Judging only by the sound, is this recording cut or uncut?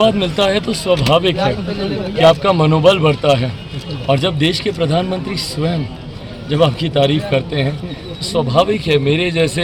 uncut